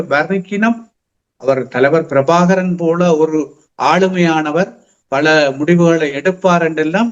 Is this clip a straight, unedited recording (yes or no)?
yes